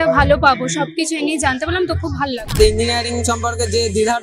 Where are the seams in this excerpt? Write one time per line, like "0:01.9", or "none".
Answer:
0:02.5